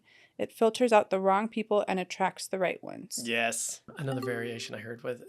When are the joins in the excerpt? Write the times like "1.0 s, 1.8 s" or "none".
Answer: 3.9 s